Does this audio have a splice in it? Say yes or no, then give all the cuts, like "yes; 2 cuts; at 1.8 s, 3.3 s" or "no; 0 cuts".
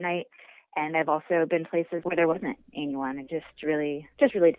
yes; 1 cut; at 2.0 s